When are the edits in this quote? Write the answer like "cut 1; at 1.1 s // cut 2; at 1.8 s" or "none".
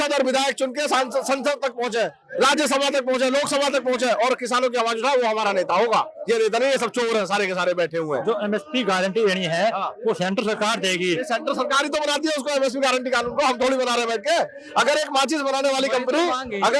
none